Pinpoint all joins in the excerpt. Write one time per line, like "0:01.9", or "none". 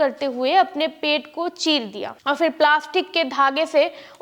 0:02.1